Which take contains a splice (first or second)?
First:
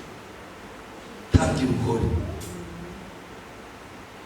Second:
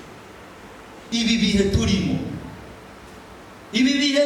second